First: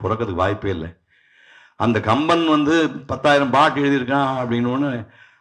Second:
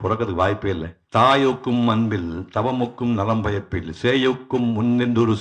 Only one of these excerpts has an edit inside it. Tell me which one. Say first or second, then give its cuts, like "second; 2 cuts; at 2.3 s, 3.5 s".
second; 1 cut; at 0.9 s